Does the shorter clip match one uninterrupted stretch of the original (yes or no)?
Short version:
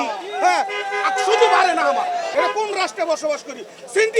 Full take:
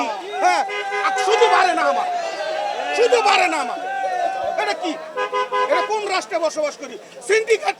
no